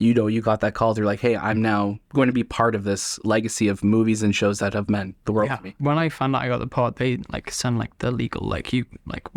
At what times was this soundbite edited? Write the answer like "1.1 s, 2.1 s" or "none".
2.0 s, 5.8 s